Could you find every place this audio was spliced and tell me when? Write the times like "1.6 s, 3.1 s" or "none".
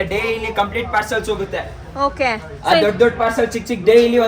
none